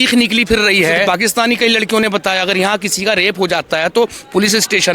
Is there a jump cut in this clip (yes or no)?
yes